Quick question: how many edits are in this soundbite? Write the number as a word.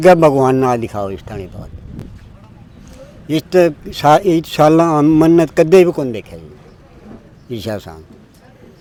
zero